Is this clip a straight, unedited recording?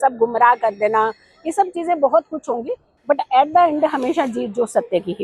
yes; 0 cuts

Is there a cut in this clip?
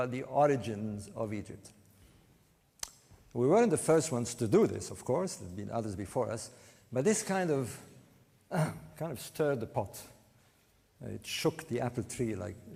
no; 0 cuts

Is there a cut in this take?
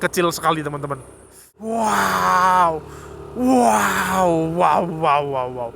yes; 1 cut; at 1.7 s

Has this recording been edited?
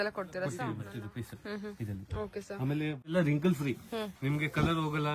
yes; 2 cuts; at 0.9 s, 3.1 s

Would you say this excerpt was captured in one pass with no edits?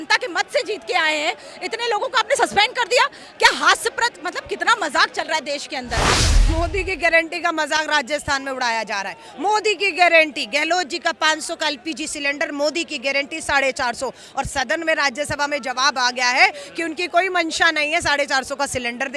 no; 1 cut; at 6.3 s

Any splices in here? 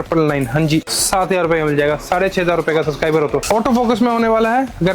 yes; 2 cuts; at 0.9 s, 3.4 s

